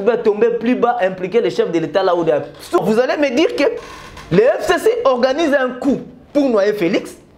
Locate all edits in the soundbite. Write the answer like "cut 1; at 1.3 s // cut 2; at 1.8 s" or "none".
cut 1; at 2.8 s